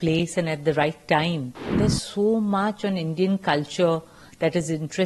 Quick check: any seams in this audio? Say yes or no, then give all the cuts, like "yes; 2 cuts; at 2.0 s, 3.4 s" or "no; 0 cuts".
yes; 1 cut; at 1.6 s